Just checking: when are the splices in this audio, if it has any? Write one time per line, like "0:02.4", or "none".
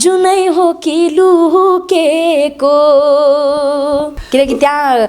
0:04.2